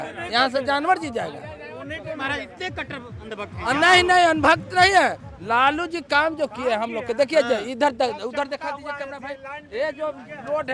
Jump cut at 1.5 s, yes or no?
no